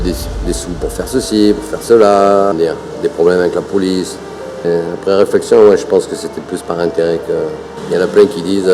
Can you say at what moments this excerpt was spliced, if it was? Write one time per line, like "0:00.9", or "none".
0:02.5
0:04.6
0:07.7